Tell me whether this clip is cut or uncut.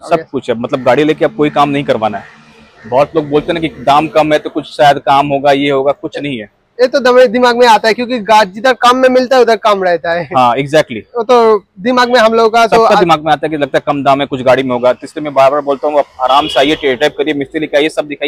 uncut